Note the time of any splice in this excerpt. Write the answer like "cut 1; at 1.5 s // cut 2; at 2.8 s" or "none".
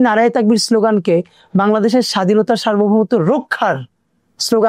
none